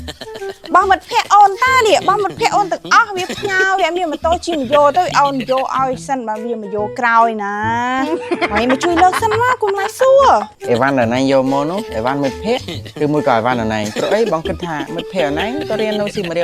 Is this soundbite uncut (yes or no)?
no